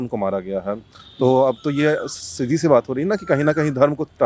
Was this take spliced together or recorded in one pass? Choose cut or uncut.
uncut